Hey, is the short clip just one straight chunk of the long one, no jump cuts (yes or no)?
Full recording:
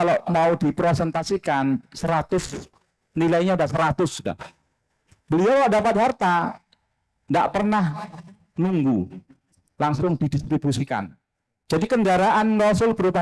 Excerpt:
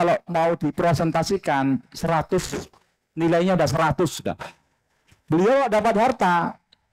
yes